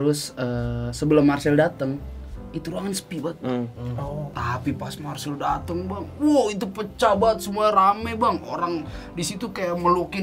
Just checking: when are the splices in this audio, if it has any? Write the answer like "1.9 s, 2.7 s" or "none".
4.3 s

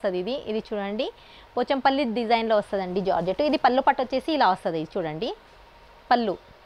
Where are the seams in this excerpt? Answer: none

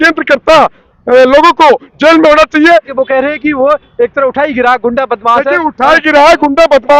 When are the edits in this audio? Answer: 2.9 s

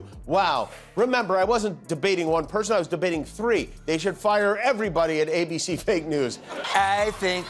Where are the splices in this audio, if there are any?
6.6 s

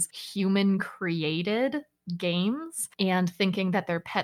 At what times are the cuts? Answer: none

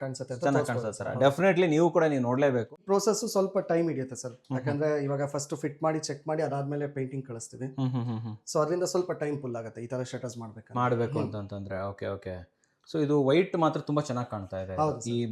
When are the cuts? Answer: 2.7 s

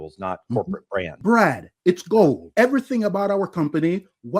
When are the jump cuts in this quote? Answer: 1.1 s, 2.4 s

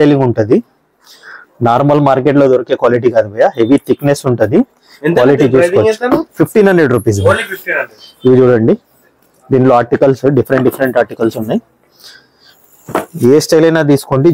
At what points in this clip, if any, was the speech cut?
none

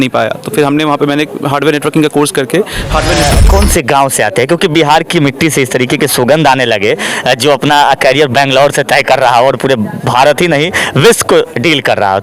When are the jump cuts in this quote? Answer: 3.3 s

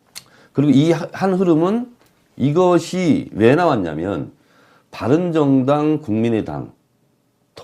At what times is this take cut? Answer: 6.0 s

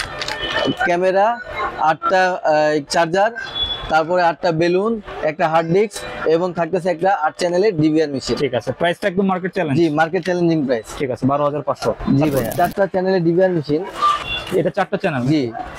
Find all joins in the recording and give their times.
12.5 s, 14.1 s

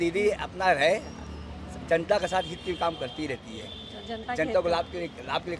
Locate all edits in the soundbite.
none

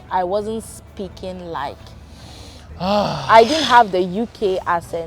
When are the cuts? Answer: none

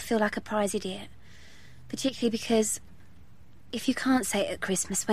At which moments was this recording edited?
1.5 s

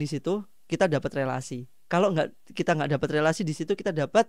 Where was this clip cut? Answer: none

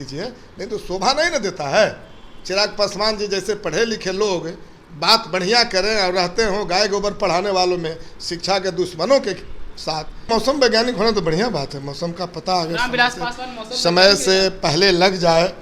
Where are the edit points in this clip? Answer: 10.3 s

